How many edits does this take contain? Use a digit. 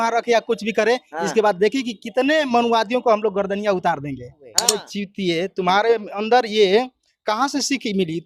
1